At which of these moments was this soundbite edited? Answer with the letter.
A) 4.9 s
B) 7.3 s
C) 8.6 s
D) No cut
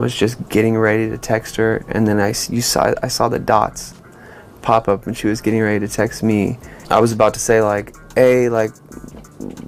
D